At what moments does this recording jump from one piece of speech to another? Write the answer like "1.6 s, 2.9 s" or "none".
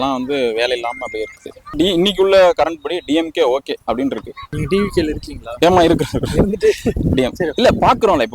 1.7 s, 4.6 s